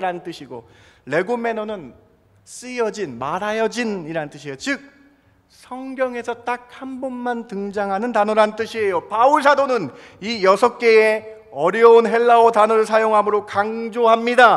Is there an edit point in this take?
no; 0 cuts

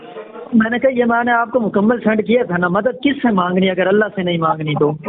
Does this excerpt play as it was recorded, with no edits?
yes; 0 cuts

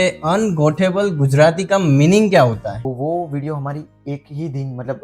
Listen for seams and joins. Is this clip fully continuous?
no; 1 cut; at 2.9 s

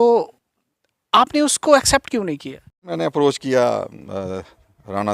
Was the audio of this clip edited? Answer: yes; 1 cut; at 2.9 s

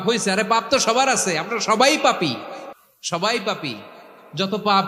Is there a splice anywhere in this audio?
no; 0 cuts

